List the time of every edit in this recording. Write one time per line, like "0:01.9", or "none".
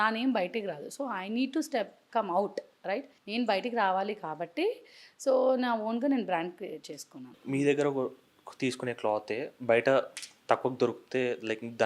0:03.2
0:07.4